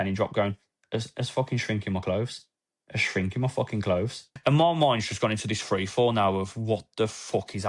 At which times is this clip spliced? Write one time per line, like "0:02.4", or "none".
0:04.3